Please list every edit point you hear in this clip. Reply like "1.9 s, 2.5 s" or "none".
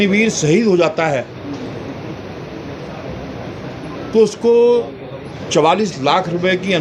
none